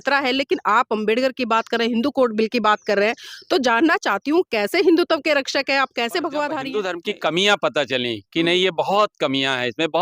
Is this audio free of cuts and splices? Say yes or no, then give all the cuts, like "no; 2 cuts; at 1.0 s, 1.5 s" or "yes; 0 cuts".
no; 1 cut; at 6.8 s